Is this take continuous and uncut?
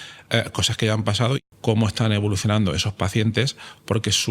no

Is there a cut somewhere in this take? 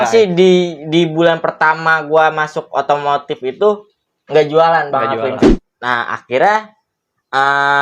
yes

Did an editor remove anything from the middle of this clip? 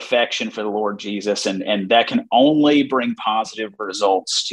no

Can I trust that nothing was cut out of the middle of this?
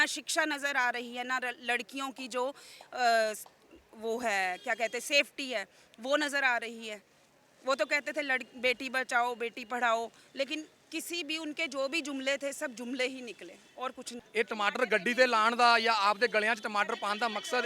no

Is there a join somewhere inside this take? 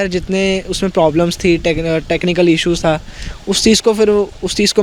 no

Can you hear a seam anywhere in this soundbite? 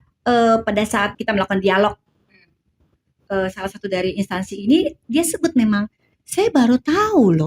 yes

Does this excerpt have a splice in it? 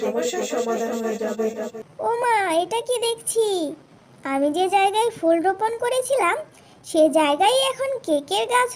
yes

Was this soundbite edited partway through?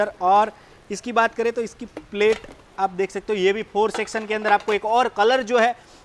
no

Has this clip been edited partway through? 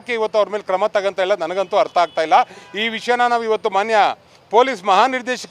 no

